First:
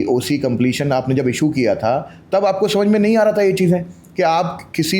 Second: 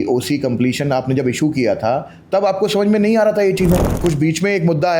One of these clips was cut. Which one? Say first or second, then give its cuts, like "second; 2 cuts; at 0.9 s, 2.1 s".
second; 1 cut; at 3.9 s